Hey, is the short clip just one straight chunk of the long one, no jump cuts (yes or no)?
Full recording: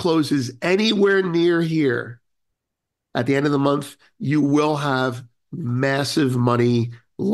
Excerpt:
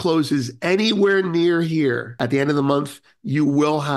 no